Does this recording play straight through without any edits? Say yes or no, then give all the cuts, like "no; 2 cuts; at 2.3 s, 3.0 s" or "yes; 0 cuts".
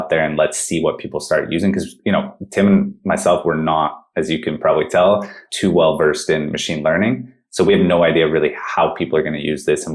yes; 0 cuts